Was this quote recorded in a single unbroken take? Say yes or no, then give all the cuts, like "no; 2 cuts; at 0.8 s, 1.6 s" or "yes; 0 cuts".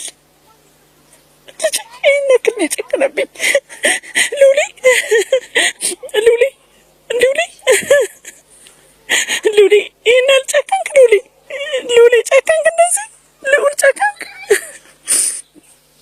yes; 0 cuts